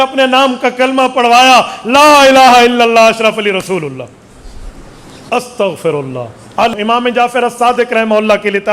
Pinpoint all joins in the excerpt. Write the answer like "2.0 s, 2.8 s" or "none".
6.7 s